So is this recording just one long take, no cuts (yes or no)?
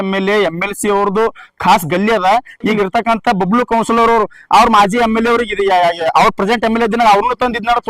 no